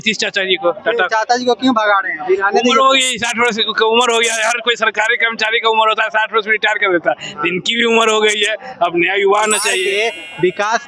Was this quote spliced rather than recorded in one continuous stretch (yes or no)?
yes